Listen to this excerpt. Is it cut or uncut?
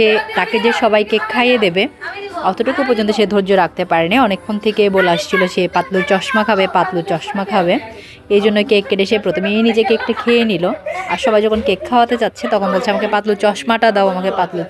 uncut